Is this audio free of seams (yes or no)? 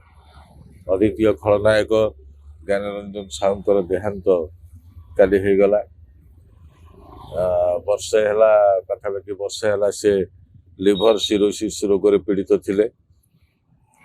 yes